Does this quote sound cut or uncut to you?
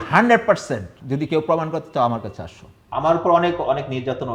cut